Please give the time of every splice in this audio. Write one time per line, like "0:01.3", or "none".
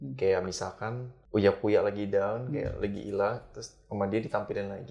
none